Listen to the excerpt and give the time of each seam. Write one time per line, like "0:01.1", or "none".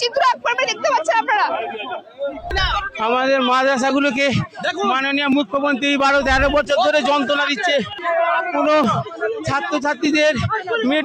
0:02.5
0:07.9